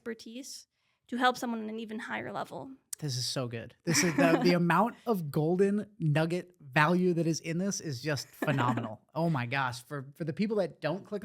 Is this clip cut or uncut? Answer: cut